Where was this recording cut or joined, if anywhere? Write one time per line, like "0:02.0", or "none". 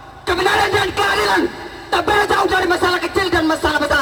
none